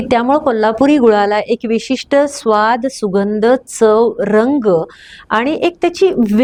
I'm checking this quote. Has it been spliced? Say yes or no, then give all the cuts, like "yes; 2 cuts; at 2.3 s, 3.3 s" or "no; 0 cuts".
no; 0 cuts